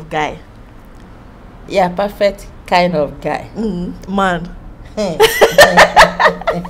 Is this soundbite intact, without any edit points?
yes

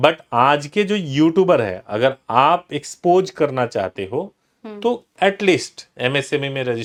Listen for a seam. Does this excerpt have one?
no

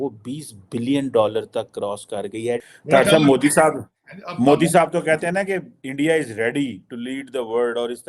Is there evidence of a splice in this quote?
yes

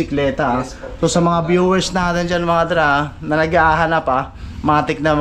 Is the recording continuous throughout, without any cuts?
yes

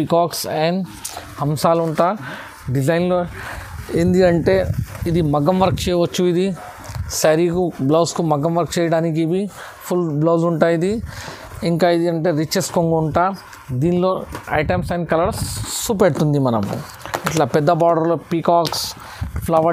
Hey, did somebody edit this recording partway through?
no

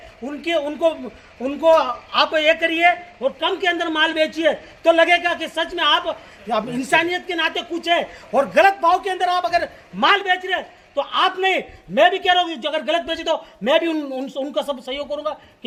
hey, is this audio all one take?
yes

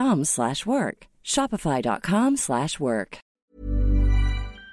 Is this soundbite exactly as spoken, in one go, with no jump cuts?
no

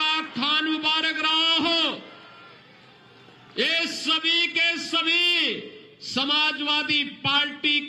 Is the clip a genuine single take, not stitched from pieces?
yes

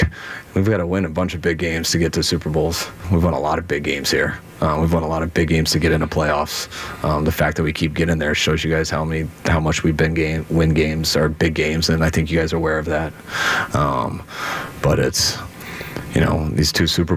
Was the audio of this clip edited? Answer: yes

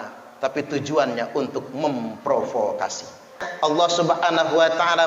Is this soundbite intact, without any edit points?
no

